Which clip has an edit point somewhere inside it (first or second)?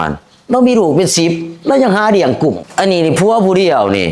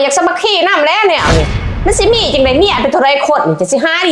second